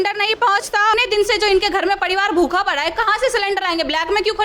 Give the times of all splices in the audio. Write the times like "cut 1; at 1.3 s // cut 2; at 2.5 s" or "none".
cut 1; at 0.9 s